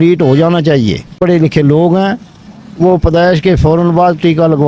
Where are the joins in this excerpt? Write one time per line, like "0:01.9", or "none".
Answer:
0:01.2